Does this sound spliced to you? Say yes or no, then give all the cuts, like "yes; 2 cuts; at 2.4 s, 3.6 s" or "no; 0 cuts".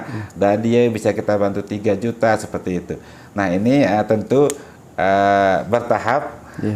no; 0 cuts